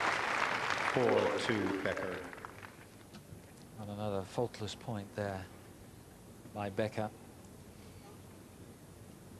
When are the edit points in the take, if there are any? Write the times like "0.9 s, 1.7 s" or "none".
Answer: none